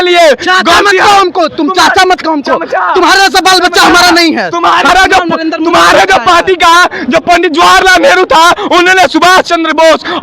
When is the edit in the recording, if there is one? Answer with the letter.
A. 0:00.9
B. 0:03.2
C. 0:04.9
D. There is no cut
C